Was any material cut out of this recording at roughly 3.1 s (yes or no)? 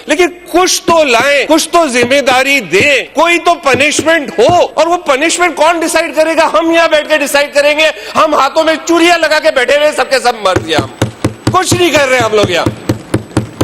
yes